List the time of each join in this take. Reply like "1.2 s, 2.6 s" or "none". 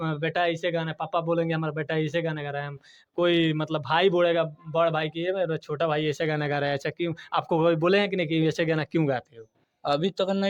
none